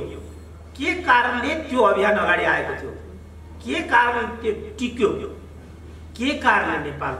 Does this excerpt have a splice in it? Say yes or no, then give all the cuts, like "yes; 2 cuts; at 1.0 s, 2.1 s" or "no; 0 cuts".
no; 0 cuts